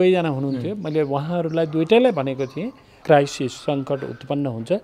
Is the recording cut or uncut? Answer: cut